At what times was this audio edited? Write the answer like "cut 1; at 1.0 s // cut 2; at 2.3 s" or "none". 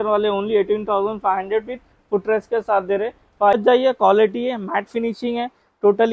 cut 1; at 3.5 s